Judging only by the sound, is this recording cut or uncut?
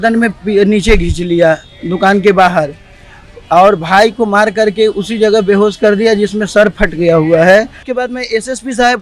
cut